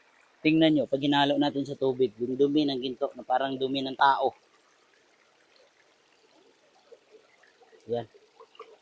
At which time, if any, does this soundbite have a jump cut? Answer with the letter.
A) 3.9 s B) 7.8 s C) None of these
A